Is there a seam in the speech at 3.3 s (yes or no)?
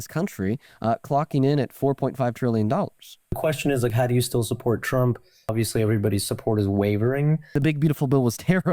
yes